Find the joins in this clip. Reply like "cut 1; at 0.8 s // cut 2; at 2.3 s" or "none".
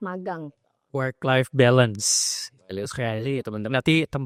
none